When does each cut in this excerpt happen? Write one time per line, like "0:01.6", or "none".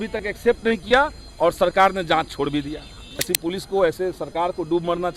0:03.2

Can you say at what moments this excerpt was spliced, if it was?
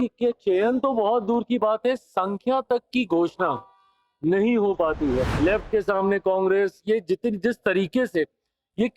0:05.3

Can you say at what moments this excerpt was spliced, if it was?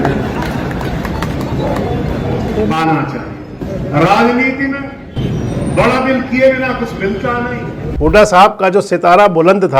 0:07.8

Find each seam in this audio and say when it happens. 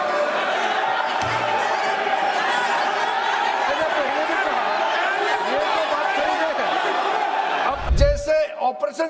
0:07.9

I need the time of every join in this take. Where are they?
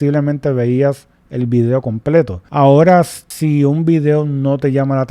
0:02.4
0:03.2

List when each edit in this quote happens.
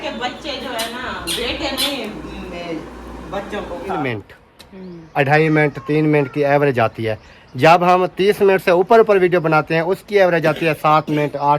0:04.0

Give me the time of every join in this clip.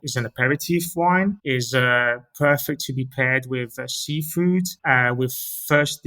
none

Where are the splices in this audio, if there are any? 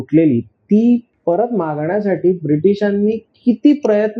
0:01.1

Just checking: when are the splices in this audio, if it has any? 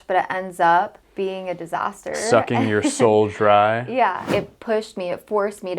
0:01.0
0:04.3

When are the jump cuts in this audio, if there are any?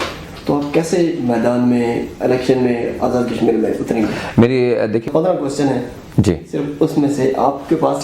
0:05.1

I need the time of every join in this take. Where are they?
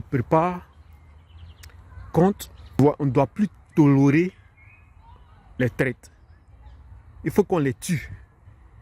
0:02.8

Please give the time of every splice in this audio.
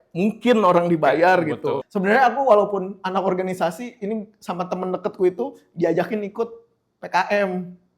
0:01.9

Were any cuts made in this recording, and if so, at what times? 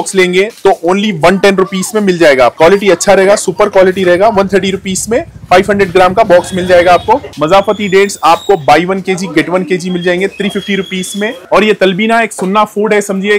0:02.5
0:07.3
0:11.4

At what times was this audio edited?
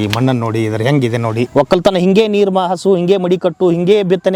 0:01.5

